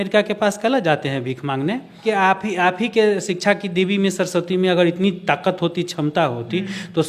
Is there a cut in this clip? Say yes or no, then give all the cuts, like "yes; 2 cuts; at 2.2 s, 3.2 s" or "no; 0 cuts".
no; 0 cuts